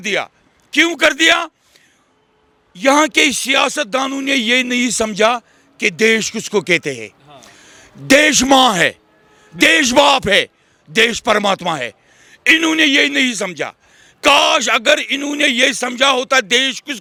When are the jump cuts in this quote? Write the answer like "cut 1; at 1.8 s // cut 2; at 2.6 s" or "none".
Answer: none